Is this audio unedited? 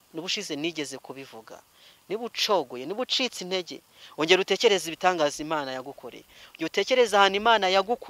yes; 0 cuts

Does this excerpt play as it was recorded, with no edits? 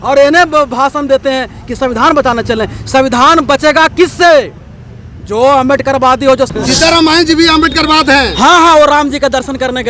no; 1 cut; at 6.5 s

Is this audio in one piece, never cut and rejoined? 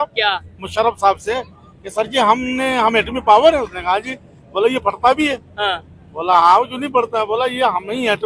yes; 0 cuts

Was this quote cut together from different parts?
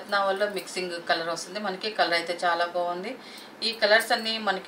no; 0 cuts

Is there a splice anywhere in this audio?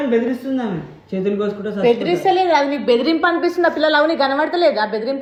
no; 0 cuts

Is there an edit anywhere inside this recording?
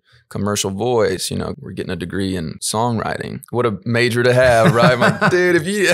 yes; 3 cuts; at 1.6 s, 2.6 s, 3.4 s

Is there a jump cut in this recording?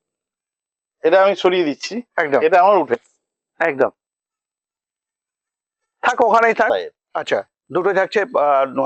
yes; 1 cut; at 6.7 s

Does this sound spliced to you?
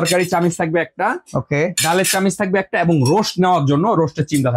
no; 0 cuts

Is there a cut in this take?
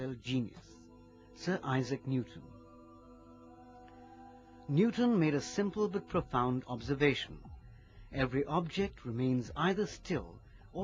yes; 1 cut; at 1.1 s

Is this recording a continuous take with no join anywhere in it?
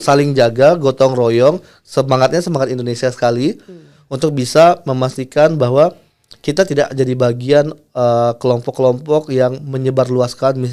yes; 0 cuts

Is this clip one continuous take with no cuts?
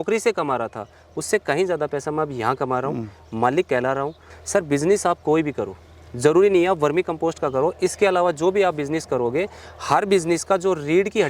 no; 1 cut; at 4.3 s

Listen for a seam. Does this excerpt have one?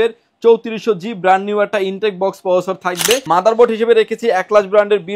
yes; 1 cut; at 3.2 s

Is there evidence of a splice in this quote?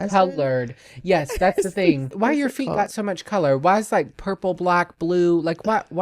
yes; 1 cut; at 2.1 s

